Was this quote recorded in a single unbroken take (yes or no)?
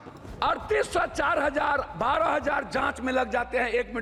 yes